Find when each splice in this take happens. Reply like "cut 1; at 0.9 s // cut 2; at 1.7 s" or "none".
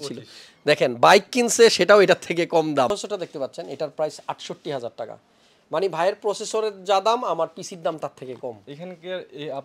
cut 1; at 2.9 s // cut 2; at 8.7 s